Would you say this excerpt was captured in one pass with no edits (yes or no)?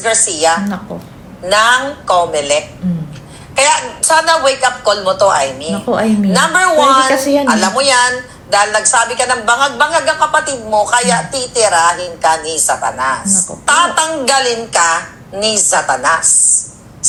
yes